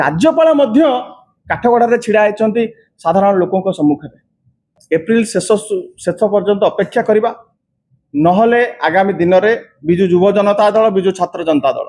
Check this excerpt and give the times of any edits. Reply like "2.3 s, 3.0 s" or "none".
4.7 s